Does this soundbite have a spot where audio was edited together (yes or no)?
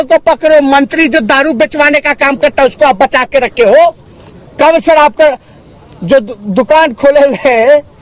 no